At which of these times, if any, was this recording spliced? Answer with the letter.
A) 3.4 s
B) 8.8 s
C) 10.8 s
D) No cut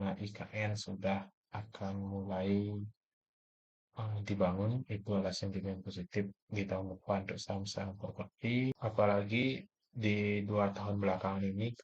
B